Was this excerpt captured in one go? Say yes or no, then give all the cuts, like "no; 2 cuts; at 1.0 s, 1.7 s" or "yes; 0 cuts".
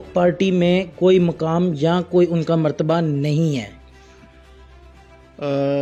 yes; 0 cuts